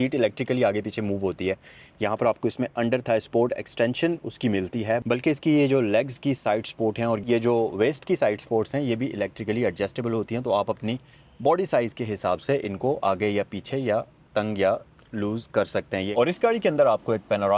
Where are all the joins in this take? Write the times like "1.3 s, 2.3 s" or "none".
16.1 s